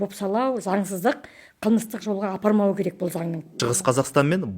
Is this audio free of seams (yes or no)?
no